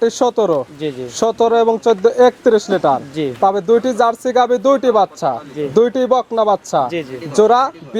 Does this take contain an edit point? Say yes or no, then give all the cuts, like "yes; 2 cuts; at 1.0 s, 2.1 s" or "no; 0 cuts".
no; 0 cuts